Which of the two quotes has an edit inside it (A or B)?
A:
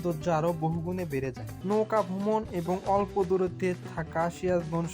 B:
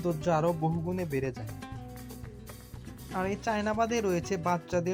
A